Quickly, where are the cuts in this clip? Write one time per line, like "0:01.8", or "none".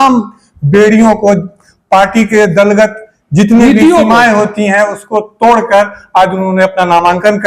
none